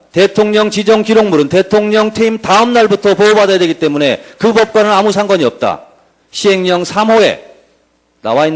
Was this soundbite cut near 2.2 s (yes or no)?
yes